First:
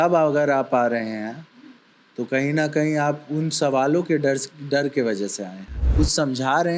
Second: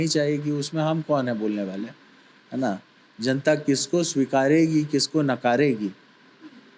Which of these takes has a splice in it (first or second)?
first